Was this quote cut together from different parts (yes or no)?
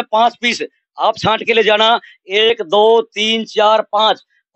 no